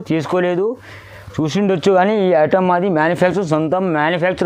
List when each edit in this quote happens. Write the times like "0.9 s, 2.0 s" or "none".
none